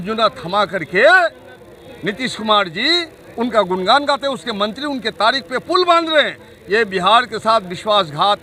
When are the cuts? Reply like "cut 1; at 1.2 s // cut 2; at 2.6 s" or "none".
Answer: none

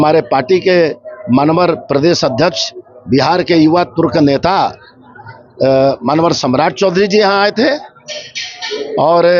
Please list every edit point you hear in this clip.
none

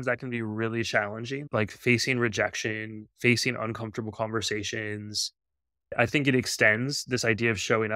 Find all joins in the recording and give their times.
cut 1; at 1.5 s

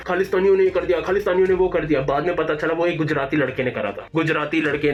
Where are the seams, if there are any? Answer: none

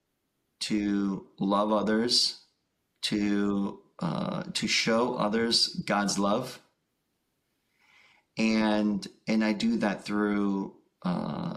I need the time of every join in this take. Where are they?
none

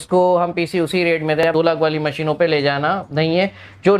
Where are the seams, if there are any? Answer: cut 1; at 1.4 s

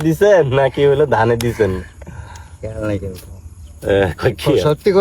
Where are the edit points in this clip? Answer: none

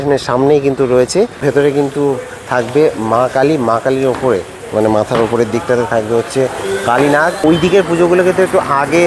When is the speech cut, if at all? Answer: cut 1; at 1.4 s // cut 2; at 7.4 s

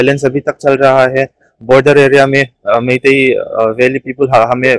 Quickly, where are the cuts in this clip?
none

